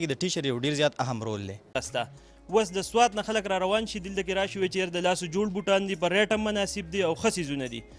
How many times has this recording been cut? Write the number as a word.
one